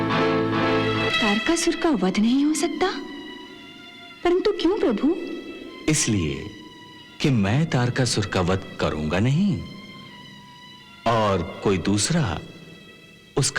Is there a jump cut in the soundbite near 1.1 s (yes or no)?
yes